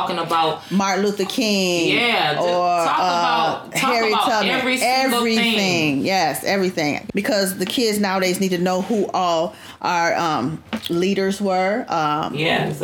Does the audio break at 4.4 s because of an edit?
no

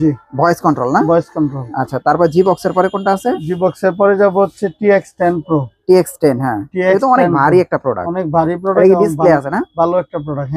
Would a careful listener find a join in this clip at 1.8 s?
no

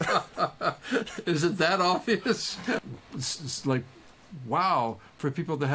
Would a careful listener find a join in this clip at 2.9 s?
yes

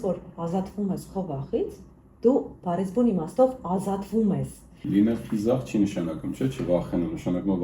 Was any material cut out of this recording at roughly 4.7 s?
yes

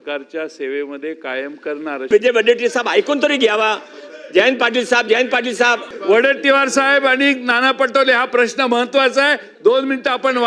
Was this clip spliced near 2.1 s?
yes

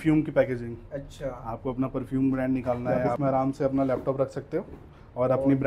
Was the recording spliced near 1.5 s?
no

